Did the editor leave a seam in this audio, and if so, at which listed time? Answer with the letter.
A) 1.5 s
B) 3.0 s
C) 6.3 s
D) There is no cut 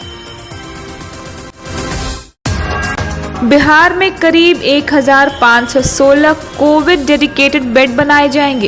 A